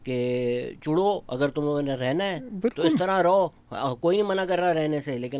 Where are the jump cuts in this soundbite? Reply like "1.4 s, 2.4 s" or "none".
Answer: none